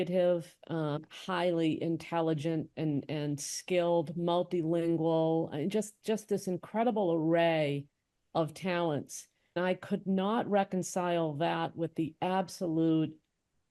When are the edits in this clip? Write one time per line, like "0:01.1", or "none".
0:01.0
0:09.6